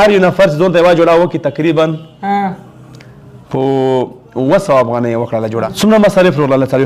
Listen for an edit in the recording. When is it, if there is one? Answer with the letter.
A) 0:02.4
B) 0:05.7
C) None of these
B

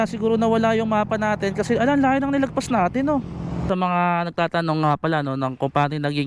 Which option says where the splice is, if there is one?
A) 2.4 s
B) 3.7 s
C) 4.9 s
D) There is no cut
B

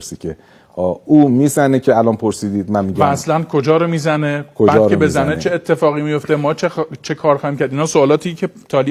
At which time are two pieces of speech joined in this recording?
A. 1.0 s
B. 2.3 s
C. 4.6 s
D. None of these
D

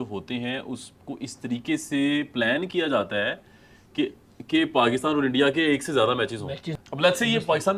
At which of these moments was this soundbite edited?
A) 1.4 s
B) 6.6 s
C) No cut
B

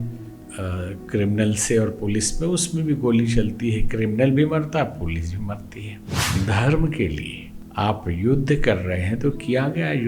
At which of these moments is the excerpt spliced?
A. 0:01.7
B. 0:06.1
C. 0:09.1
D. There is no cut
B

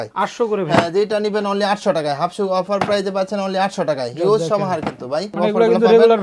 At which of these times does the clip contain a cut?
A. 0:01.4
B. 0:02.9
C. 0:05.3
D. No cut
C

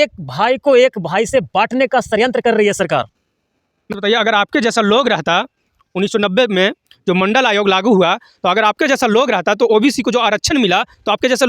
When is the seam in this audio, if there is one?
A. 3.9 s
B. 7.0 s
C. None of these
A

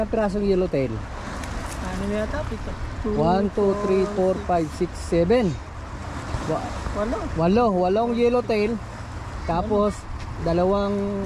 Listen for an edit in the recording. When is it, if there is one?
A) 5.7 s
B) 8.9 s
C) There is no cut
C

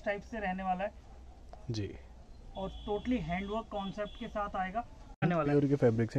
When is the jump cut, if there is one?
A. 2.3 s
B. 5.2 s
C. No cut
B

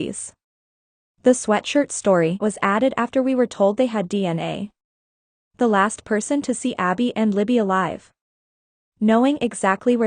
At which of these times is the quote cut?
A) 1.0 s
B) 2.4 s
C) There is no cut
B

